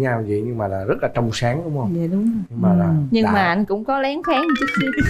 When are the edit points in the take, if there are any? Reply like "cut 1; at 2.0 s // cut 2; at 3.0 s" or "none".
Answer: none